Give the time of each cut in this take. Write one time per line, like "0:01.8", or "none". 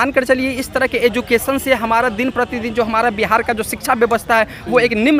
none